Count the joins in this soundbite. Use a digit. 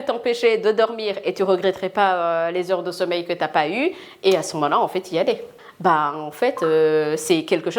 1